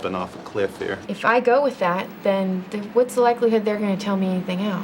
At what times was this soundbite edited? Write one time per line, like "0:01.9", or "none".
0:01.0
0:03.8